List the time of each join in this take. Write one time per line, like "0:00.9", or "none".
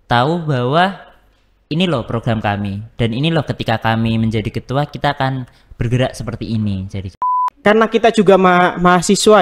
0:07.5